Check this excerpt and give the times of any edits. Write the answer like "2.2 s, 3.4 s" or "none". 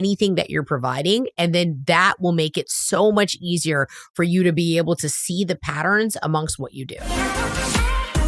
7.1 s